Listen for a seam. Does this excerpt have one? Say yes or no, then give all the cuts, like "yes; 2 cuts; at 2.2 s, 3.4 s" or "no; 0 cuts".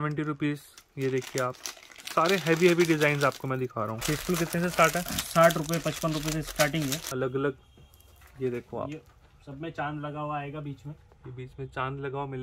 yes; 2 cuts; at 4.0 s, 7.0 s